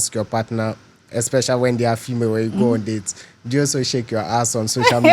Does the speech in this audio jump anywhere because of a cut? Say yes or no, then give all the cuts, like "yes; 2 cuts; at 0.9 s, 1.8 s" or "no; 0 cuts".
no; 0 cuts